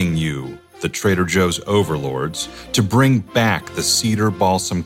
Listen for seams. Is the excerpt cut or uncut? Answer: uncut